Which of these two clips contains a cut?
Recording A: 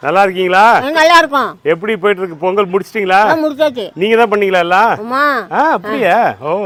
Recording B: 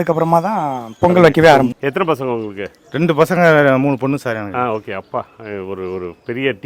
B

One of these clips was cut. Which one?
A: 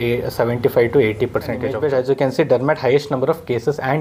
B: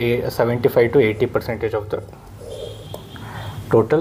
A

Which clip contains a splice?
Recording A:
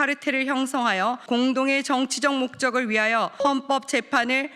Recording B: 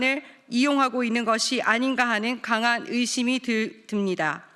A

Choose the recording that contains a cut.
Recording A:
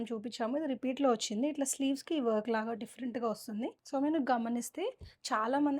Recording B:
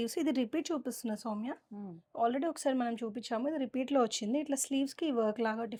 A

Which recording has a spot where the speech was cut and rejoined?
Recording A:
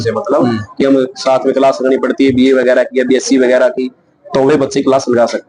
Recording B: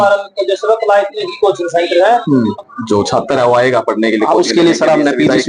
B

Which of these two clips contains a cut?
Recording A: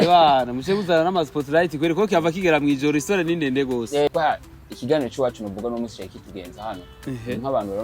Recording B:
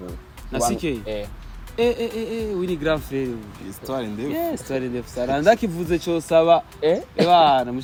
A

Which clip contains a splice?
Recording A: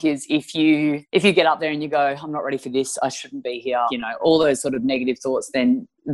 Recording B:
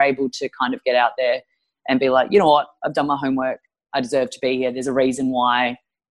A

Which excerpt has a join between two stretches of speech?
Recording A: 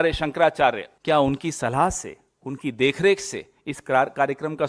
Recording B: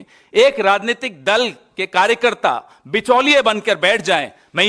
A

